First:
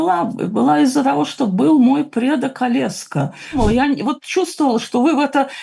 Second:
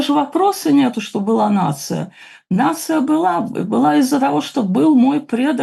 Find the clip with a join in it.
first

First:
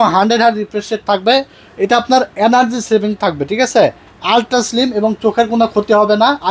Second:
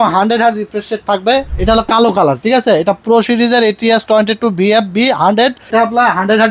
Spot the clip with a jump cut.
second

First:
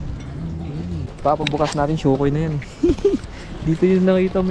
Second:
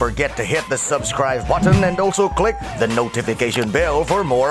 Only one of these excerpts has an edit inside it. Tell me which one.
first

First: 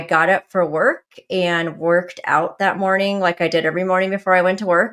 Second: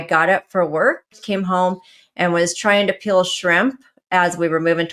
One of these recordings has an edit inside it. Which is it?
second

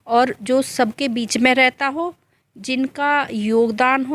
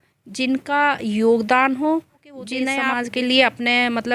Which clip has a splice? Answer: second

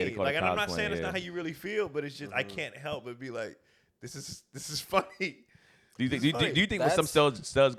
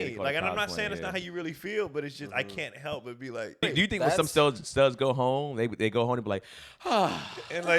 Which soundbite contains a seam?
second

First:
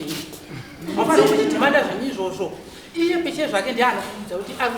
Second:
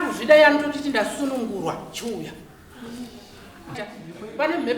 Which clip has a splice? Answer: second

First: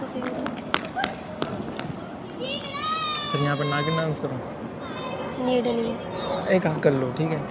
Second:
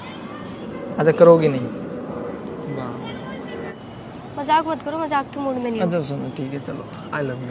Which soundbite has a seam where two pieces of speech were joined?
second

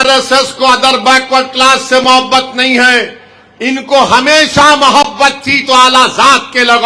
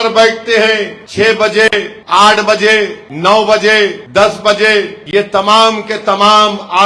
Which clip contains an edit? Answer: second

